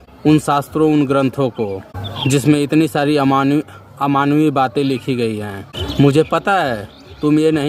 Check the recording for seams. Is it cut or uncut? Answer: uncut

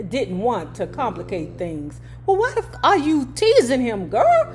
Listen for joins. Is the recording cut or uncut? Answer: cut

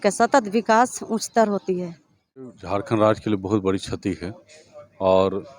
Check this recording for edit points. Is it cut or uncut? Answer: cut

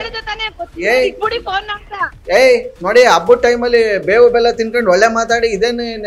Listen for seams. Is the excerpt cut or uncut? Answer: uncut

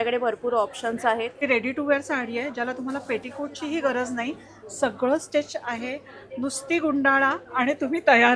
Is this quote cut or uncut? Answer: cut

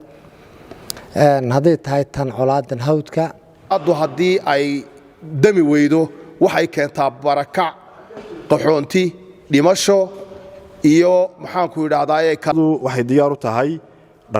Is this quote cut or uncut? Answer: cut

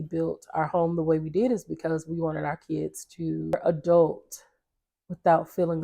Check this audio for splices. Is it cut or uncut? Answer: cut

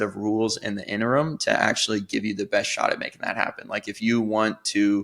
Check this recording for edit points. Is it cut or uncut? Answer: uncut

